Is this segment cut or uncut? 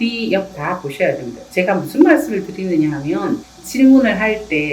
cut